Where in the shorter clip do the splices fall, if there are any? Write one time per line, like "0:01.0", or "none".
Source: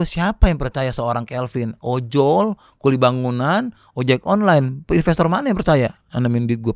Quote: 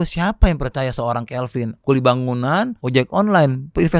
0:01.7
0:02.8